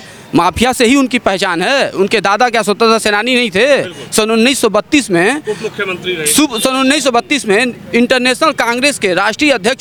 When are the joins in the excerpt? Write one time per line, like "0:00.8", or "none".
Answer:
none